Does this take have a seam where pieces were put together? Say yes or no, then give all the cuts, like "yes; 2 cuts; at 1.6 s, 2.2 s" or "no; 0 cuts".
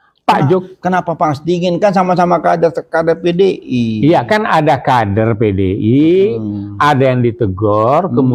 no; 0 cuts